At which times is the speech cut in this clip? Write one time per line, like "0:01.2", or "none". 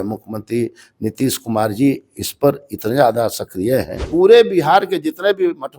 0:04.0